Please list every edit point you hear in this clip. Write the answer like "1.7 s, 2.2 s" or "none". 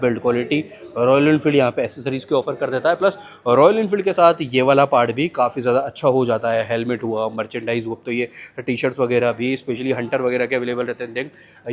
none